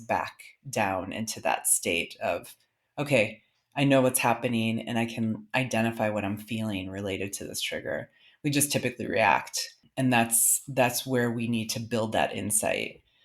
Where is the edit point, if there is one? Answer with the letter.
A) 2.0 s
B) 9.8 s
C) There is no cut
B